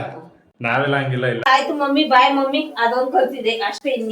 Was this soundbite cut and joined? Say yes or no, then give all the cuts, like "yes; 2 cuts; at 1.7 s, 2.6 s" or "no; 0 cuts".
yes; 1 cut; at 1.4 s